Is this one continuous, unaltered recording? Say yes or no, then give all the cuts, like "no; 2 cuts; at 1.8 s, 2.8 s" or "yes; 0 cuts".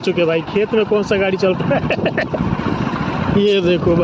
yes; 0 cuts